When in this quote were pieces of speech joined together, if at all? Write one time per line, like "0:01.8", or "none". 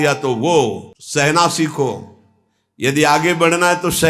0:00.9